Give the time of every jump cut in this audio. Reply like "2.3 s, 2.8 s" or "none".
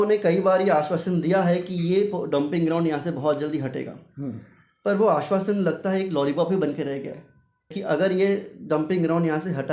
7.8 s